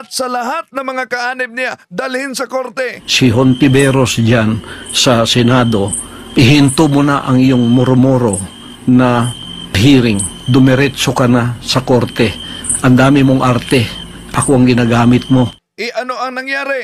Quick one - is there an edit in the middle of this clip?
yes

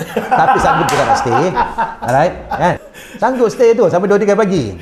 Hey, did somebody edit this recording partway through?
yes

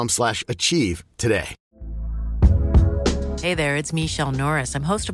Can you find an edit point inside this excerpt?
no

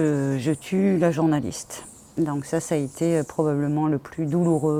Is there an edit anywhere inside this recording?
no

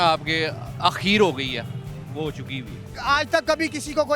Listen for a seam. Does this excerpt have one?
yes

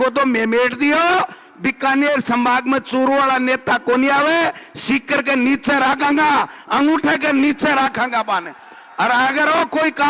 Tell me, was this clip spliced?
no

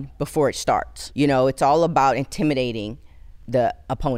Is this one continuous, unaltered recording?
no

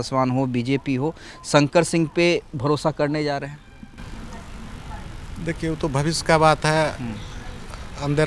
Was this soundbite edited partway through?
no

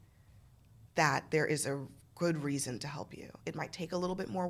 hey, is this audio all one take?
no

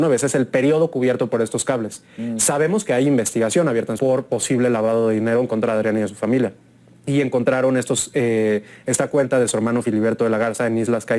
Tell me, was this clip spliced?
yes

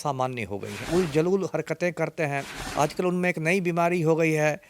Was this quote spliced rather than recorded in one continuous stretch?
yes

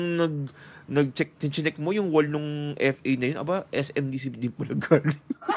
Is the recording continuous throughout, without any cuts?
yes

